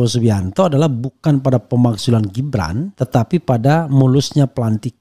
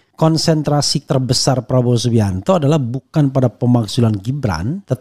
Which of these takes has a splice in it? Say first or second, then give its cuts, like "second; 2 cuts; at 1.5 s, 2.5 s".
second; 1 cut; at 1.0 s